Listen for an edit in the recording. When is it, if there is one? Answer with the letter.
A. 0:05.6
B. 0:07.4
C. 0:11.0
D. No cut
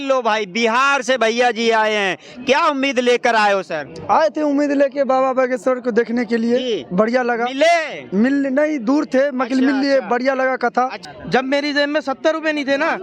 C